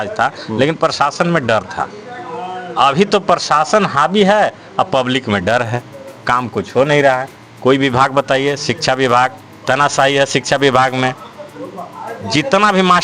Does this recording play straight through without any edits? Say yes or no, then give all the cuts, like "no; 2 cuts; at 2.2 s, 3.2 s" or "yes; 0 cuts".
yes; 0 cuts